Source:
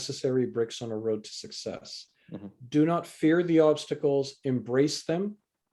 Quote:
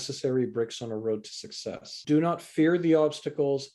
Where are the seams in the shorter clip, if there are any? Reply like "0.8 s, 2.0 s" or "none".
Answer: 1.9 s